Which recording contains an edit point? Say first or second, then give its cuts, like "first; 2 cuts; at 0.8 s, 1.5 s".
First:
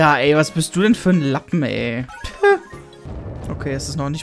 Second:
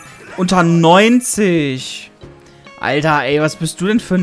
first; 2 cuts; at 2.2 s, 3.0 s